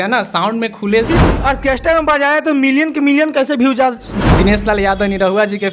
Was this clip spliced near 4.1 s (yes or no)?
yes